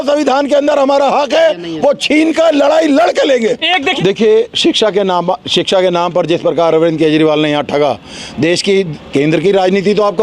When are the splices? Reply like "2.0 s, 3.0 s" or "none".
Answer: 3.9 s